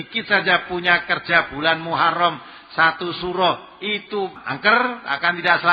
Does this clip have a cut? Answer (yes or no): yes